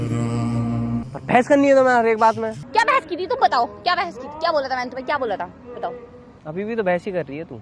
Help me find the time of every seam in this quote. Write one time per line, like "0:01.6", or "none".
0:01.0
0:02.6